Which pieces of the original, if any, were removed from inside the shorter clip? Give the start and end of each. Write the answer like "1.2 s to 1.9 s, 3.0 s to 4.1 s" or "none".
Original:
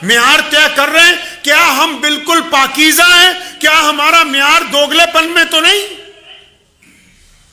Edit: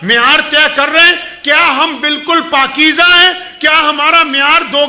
none